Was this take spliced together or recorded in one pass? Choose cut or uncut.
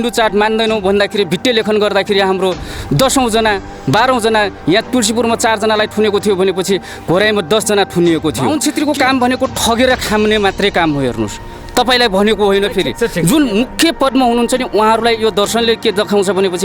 cut